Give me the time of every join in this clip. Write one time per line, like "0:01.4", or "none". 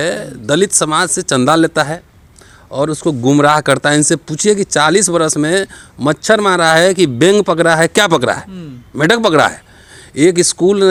none